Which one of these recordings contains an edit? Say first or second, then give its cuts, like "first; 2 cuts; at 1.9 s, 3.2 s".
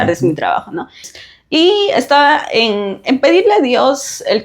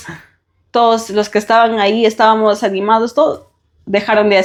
first; 1 cut; at 1.2 s